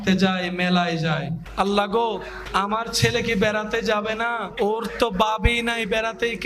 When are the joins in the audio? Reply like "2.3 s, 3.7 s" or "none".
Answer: 1.4 s, 2.3 s, 4.5 s